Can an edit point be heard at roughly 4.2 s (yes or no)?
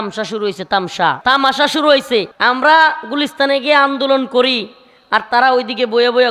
no